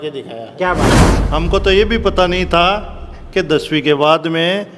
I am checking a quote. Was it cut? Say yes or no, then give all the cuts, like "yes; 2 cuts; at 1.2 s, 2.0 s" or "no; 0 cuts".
yes; 1 cut; at 1.1 s